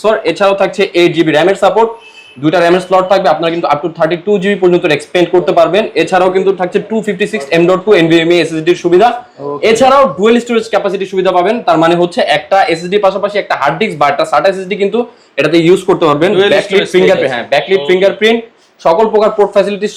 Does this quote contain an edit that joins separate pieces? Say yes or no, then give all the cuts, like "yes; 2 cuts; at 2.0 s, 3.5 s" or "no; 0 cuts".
no; 0 cuts